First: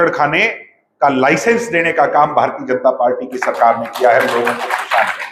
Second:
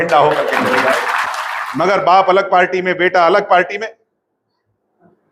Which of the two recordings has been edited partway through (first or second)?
second